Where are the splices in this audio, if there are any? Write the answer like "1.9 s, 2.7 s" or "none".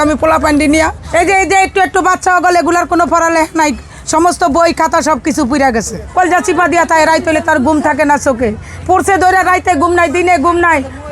1.0 s, 6.0 s